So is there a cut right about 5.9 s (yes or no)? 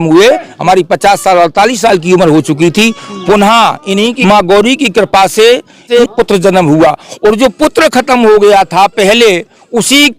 yes